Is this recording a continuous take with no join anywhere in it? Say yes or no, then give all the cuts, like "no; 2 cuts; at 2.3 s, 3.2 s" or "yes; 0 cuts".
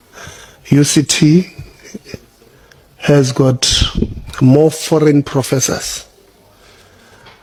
yes; 0 cuts